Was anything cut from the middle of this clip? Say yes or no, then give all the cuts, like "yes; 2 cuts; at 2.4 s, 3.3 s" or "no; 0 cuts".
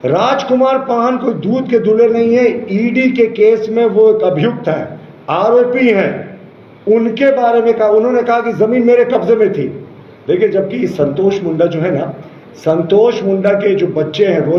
no; 0 cuts